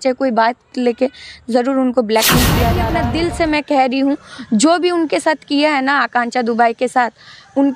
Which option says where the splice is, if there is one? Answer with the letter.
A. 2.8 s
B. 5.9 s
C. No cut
A